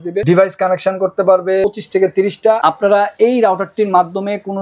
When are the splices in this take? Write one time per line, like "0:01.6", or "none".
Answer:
0:01.6
0:02.6